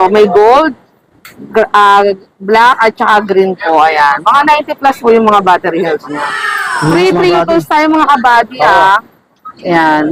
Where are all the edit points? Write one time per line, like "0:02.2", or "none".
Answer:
none